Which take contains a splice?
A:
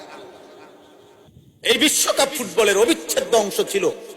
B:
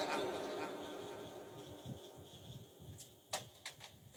A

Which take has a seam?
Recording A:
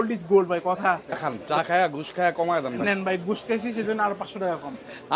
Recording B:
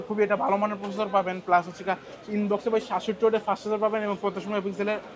A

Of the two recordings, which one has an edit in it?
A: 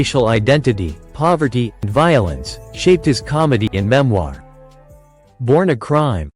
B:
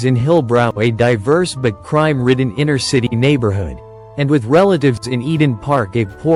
A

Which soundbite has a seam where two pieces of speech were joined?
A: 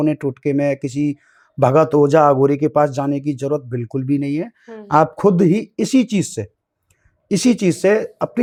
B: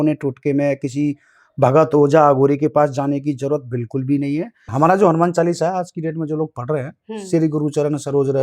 B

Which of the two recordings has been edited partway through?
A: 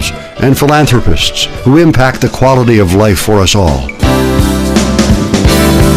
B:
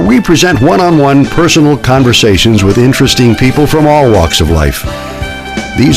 A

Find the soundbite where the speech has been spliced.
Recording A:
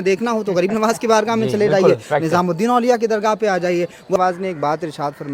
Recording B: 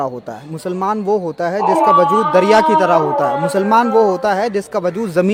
A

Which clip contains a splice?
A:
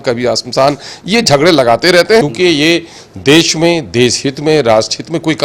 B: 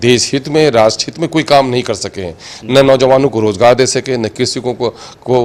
A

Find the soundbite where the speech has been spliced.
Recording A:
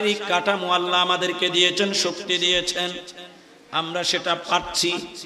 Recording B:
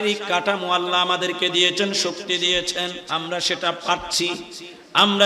B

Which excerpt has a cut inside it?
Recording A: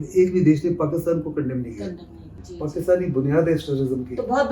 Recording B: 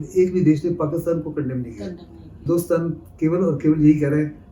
B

